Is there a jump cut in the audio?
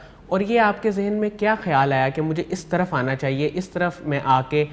no; 0 cuts

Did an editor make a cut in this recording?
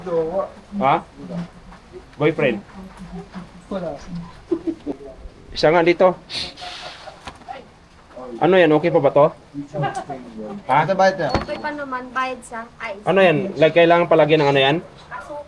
yes; 1 cut; at 4.9 s

